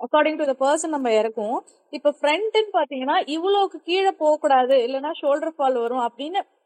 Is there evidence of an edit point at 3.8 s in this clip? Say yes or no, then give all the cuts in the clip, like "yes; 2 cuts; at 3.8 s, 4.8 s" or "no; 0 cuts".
no; 0 cuts